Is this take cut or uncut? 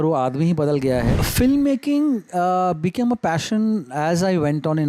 cut